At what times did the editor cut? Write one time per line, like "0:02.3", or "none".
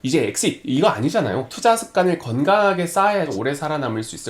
0:01.5
0:03.3